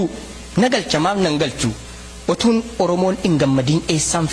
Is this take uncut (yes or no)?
yes